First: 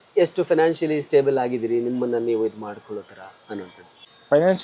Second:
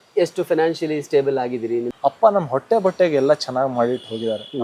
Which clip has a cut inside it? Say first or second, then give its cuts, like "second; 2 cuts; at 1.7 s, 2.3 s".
second; 1 cut; at 1.9 s